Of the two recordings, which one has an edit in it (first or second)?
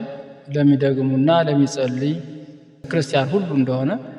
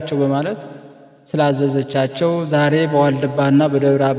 first